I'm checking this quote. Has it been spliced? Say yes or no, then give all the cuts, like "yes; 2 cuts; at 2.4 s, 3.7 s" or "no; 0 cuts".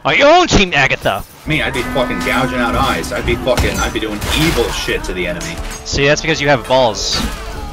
yes; 1 cut; at 1.4 s